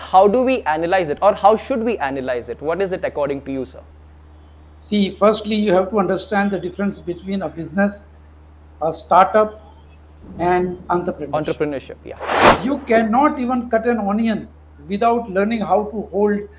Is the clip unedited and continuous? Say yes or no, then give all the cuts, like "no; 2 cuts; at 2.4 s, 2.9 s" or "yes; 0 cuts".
no; 1 cut; at 12.5 s